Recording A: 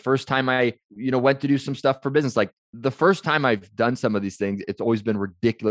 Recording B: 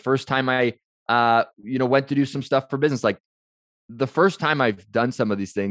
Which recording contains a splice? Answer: A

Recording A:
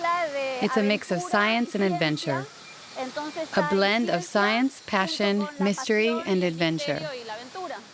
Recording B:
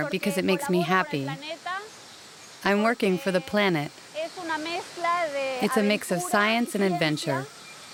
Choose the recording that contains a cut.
A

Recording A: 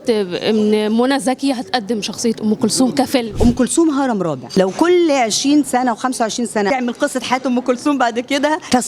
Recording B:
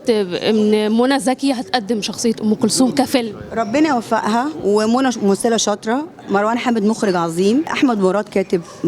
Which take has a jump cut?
A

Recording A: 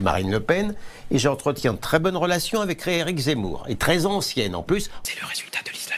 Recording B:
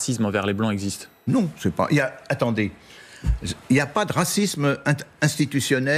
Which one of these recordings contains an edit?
A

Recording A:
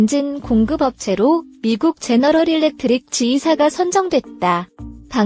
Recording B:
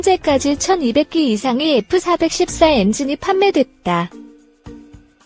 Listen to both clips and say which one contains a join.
B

